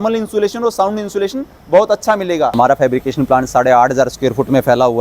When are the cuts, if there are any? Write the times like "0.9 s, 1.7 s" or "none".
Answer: 2.5 s